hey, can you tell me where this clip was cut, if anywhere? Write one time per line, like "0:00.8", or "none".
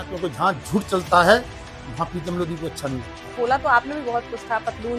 0:03.4

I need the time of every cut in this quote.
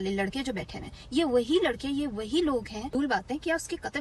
0:02.9

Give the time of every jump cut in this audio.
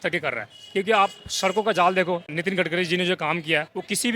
0:02.3

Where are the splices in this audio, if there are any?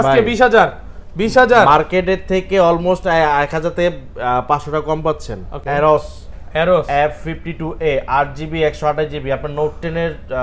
0:05.5

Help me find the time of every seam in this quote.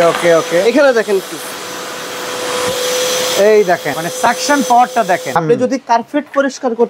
0:04.0
0:05.3

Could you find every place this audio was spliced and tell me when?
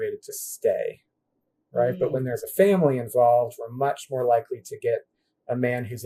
none

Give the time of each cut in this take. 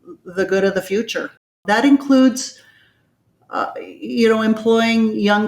0:01.6

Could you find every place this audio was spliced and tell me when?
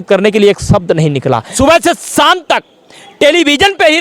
0:01.5

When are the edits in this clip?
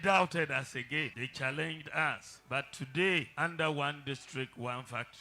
0:01.2
0:02.3
0:03.3

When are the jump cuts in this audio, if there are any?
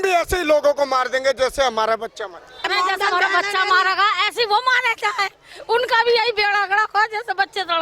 0:02.6

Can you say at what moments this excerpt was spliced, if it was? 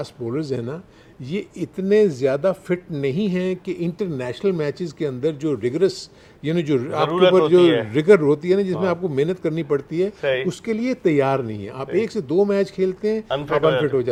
none

